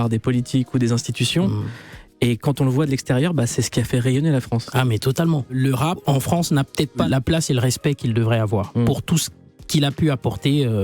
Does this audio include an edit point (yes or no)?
yes